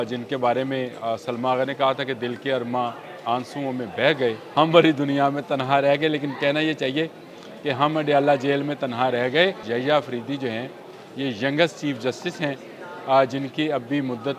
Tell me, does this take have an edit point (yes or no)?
yes